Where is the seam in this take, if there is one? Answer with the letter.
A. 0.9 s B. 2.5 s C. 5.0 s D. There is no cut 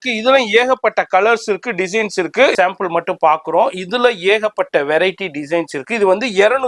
B